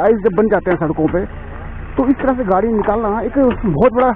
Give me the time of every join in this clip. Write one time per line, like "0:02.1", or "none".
none